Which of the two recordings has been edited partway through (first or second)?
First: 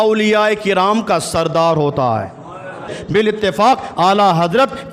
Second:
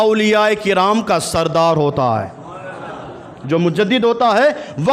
first